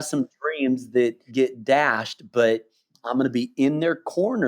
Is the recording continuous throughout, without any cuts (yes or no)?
no